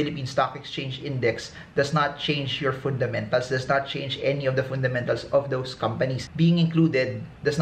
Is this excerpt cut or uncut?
cut